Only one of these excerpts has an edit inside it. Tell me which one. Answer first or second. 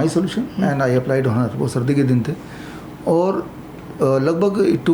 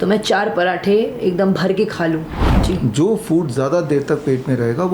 second